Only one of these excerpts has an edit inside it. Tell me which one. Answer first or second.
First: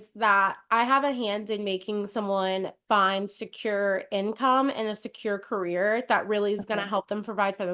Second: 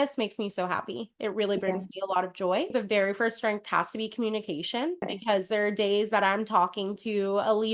second